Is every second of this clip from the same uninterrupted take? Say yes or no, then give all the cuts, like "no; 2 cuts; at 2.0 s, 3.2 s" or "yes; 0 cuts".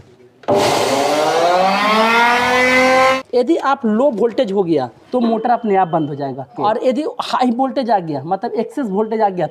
no; 3 cuts; at 3.1 s, 5.0 s, 6.5 s